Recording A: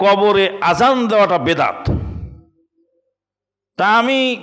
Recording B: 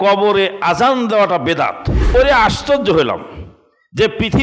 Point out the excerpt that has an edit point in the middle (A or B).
B